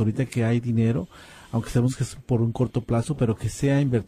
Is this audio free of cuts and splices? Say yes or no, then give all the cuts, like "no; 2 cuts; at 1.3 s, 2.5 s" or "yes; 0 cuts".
no; 1 cut; at 2.1 s